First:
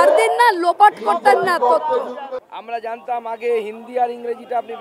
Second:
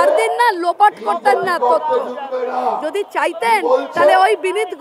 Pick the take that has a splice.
first; 1 cut; at 2.2 s

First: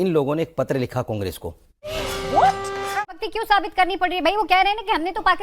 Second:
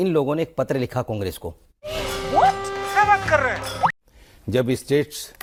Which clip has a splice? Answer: first; 1 cut; at 2.9 s

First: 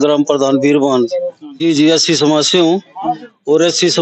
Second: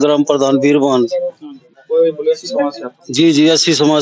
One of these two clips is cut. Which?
first; 1 cut; at 1.4 s

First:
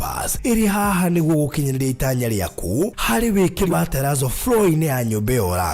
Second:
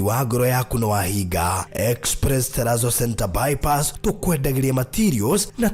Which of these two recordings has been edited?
first; 1 cut; at 3.7 s

